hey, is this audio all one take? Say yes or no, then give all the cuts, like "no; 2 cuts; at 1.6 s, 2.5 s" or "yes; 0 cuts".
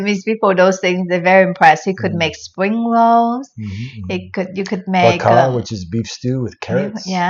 yes; 0 cuts